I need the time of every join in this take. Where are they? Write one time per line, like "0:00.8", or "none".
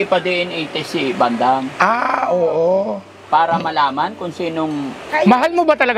0:05.1

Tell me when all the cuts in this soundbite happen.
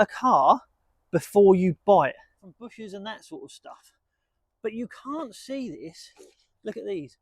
0:02.6

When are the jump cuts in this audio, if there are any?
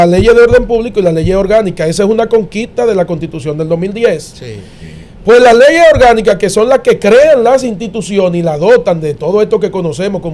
none

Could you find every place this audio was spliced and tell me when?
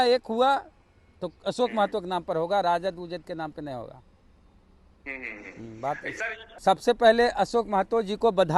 none

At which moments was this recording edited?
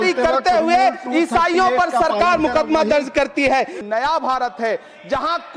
0:03.8

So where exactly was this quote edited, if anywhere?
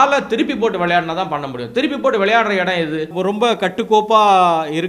0:03.1

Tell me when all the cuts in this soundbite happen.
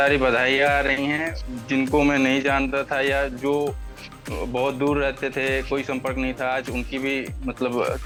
none

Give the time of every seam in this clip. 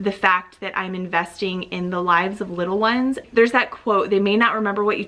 none

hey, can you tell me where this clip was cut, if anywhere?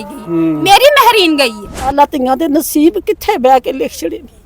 0:01.9

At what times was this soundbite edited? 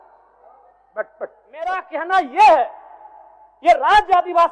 0:01.8

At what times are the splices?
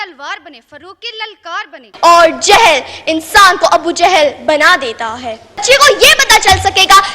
0:01.9
0:05.6

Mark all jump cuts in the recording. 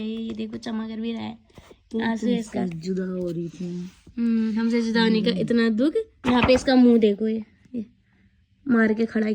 0:06.1

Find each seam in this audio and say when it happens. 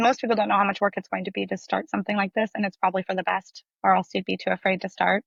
none

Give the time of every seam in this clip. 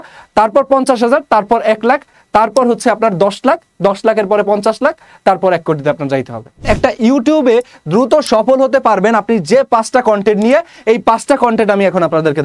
0:06.6

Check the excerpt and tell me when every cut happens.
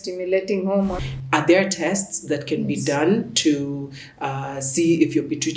0:01.0

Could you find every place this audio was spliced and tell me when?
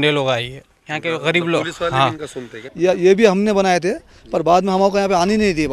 0:02.6

